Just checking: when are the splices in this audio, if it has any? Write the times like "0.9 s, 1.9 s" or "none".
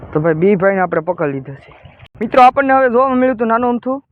2.1 s